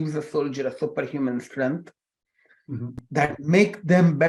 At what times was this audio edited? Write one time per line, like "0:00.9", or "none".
none